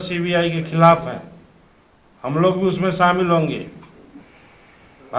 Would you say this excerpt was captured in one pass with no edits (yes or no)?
yes